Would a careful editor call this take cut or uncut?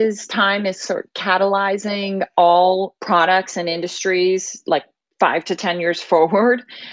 cut